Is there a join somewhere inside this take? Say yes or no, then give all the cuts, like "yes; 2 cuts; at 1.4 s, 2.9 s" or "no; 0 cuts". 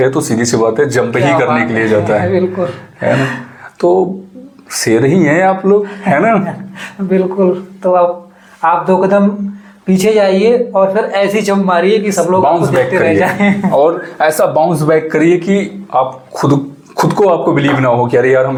no; 0 cuts